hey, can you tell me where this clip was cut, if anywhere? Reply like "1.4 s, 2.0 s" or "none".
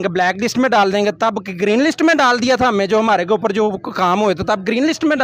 none